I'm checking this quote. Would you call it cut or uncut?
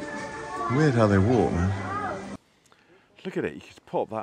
cut